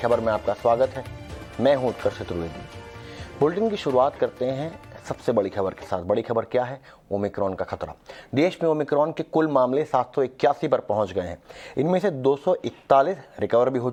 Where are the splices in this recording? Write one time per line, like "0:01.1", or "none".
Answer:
none